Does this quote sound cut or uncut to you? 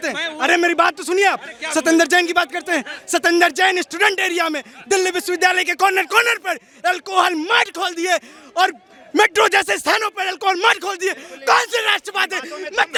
uncut